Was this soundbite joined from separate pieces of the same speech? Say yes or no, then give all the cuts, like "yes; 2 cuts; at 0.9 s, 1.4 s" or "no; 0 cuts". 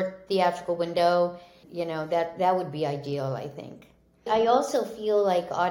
yes; 2 cuts; at 1.6 s, 4.3 s